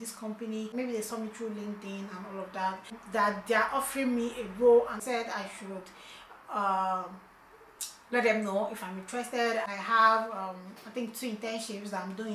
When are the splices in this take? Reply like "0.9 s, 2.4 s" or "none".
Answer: 3.0 s, 5.0 s, 9.7 s